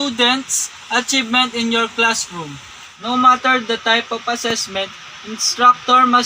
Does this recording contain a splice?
yes; 1 cut; at 2.9 s

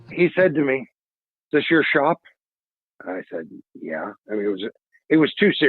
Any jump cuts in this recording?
yes; 1 cut; at 1.0 s

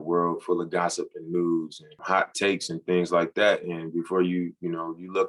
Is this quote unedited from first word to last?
no; 1 cut; at 1.9 s

